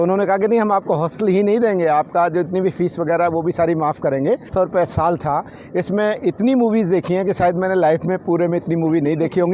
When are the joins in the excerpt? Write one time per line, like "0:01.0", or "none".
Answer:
0:04.5